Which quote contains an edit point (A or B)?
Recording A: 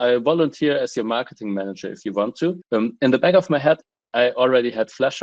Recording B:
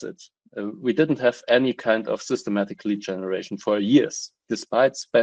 A